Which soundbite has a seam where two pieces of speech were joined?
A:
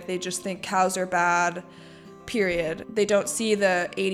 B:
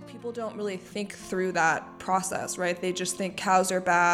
A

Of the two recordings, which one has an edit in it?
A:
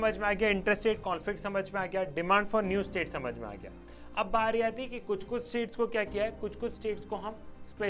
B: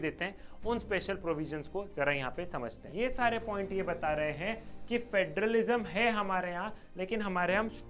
B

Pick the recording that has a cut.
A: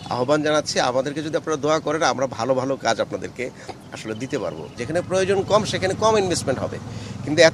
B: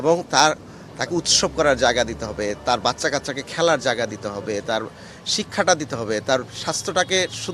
A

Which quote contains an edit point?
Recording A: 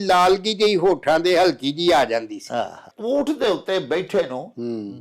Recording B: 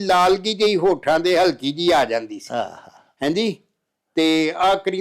A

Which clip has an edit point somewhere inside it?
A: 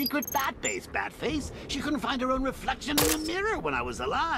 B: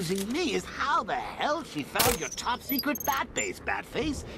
B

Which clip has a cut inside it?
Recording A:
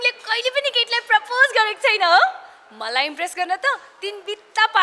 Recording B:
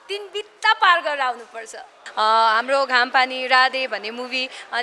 B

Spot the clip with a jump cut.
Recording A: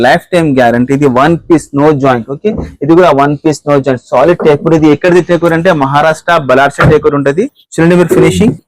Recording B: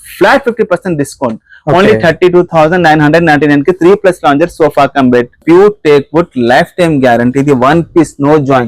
B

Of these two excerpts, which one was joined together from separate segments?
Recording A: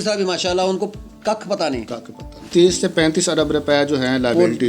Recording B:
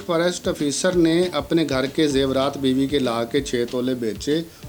A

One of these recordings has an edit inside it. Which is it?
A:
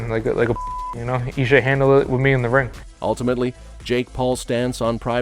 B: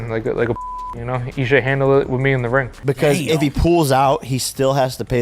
B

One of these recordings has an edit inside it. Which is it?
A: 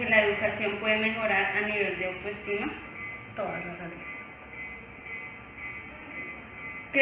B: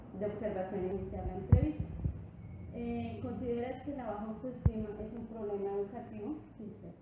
B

